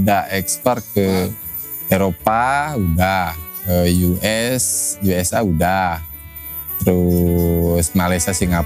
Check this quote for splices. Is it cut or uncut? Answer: uncut